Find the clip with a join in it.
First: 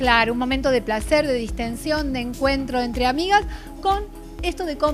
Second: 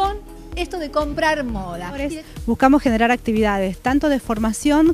second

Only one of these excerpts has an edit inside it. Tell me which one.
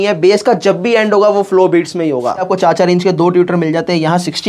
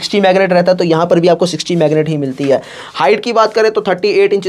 first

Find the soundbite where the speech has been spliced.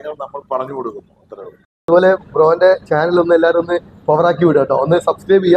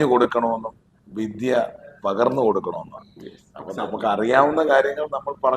first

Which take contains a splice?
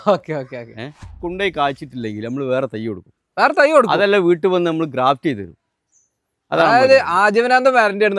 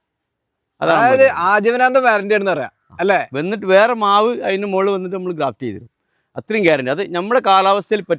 first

